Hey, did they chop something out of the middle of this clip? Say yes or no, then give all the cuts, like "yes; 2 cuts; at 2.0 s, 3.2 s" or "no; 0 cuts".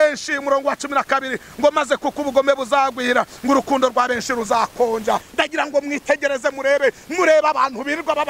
yes; 1 cut; at 5.3 s